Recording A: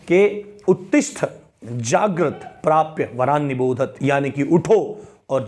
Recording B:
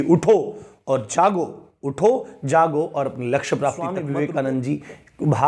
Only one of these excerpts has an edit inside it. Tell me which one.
B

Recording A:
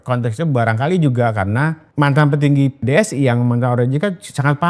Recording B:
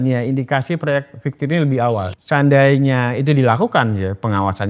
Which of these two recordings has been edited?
A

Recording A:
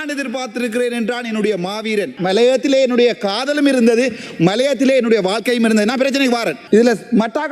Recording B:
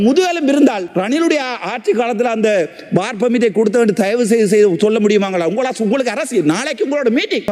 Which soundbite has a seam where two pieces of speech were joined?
A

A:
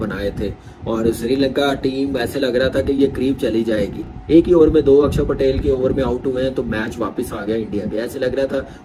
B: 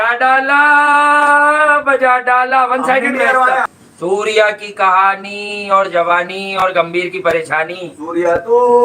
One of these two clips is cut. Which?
B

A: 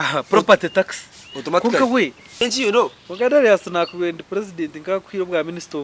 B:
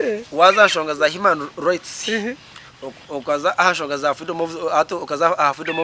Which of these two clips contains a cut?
A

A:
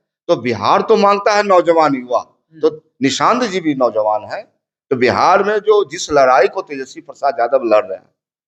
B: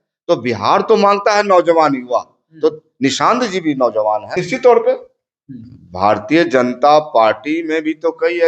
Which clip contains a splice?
B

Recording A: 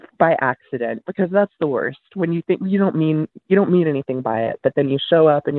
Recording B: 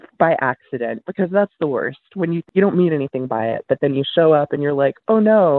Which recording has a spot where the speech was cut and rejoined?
B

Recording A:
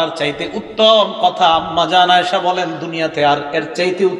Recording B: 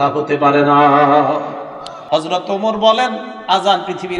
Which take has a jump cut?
B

